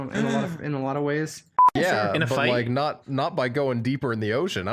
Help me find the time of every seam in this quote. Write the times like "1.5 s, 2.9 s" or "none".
1.7 s